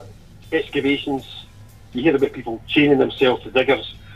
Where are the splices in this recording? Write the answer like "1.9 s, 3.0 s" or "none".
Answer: 1.9 s

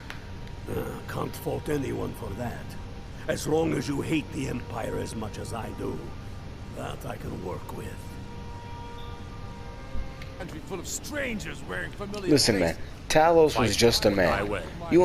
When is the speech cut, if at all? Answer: 10.4 s

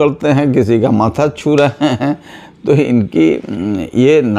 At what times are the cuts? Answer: none

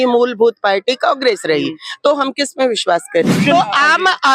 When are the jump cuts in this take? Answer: 3.4 s

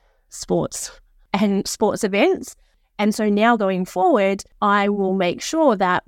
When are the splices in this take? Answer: 1.1 s, 2.8 s, 4.5 s

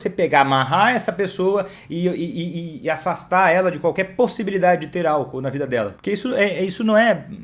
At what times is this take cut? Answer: 6.0 s

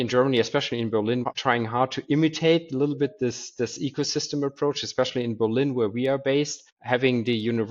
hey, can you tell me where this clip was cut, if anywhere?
1.2 s

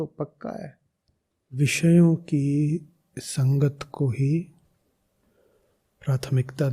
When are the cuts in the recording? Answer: 1.6 s

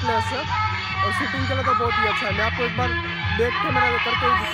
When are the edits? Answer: none

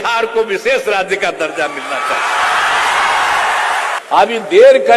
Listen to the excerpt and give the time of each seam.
3.9 s

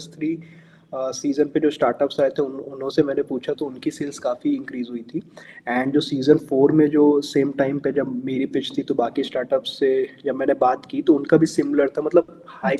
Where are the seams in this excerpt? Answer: none

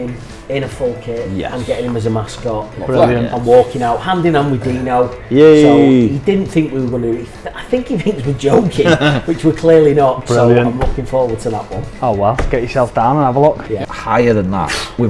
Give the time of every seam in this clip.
13.9 s

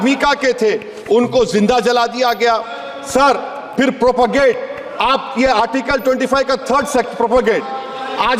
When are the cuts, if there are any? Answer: none

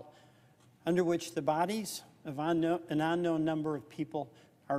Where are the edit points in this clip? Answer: 0.9 s

